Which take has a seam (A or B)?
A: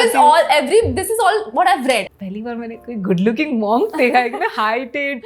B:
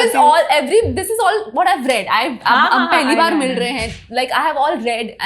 A